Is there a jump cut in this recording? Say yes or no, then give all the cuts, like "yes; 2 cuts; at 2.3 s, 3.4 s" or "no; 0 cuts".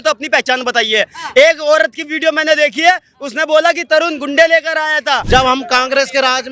yes; 1 cut; at 5.2 s